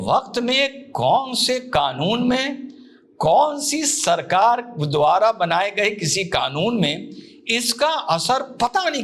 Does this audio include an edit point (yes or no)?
no